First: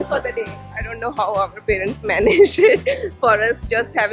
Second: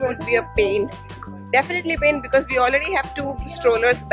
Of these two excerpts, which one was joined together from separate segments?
first; 1 cut; at 1.0 s

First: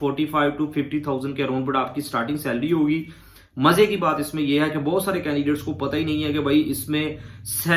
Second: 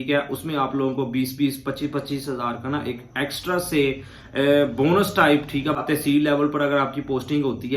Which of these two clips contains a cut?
second; 1 cut; at 5.8 s

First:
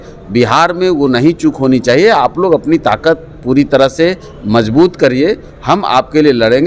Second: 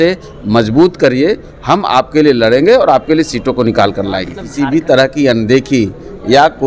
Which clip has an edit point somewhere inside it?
second; 1 cut; at 4.4 s

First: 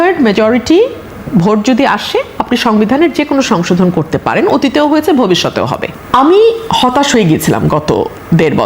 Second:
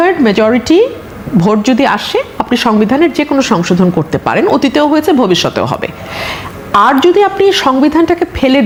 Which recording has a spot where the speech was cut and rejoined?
first; 1 cut; at 5.9 s

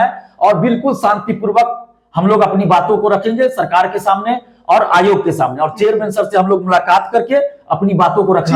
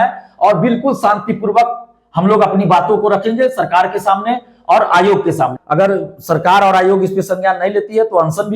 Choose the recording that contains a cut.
second; 1 cut; at 5.5 s

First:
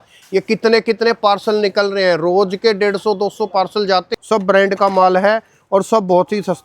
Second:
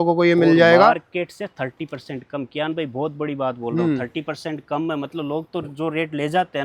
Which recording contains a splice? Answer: first; 1 cut; at 4.2 s

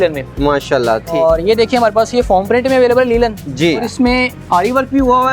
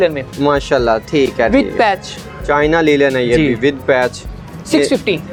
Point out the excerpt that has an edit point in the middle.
first; 2 cuts; at 1.1 s, 3.9 s

